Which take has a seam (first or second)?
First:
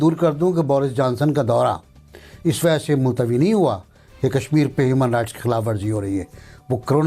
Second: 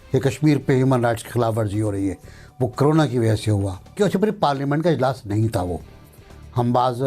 second